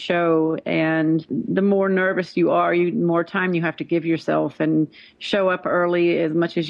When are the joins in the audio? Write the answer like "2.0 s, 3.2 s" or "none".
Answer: 1.3 s

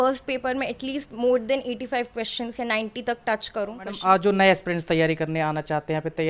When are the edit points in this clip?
4.0 s

